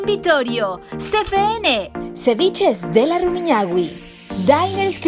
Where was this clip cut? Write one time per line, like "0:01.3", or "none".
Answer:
none